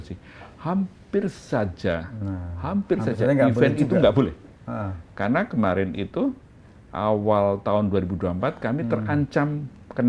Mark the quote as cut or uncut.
uncut